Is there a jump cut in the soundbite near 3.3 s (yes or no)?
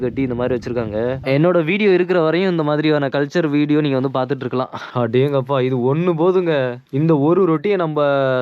no